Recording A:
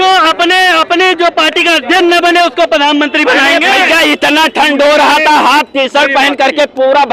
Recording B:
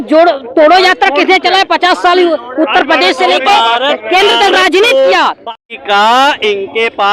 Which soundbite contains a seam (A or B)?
B